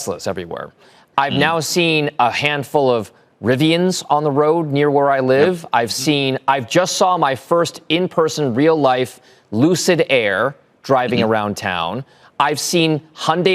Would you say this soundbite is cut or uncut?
uncut